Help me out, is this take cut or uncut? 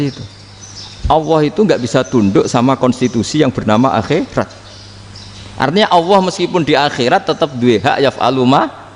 uncut